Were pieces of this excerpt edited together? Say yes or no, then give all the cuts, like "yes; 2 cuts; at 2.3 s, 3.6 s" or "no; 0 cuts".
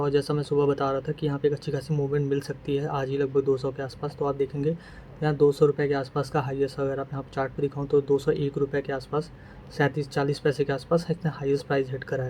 no; 0 cuts